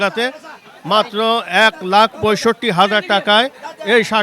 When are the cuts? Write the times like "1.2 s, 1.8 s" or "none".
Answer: none